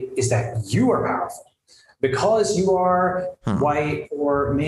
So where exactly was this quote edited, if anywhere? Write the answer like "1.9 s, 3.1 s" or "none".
none